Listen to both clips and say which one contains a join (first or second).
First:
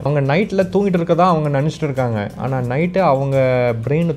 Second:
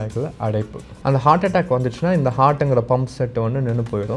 second